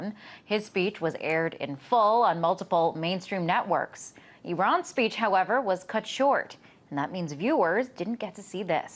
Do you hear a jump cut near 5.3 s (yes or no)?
yes